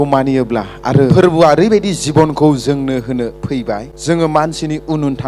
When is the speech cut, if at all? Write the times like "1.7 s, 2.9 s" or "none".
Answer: 1.1 s, 3.9 s